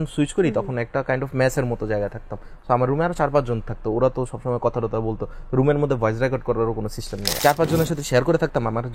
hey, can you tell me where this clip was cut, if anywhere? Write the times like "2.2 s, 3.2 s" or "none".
7.3 s